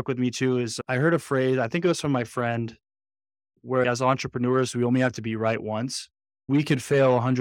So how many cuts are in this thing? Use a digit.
2